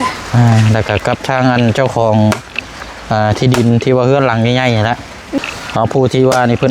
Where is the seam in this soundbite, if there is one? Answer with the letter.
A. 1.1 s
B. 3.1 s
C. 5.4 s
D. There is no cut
C